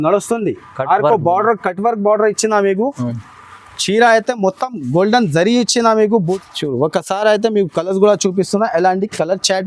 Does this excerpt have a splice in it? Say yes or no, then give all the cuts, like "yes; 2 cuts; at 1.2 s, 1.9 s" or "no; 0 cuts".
yes; 1 cut; at 6.4 s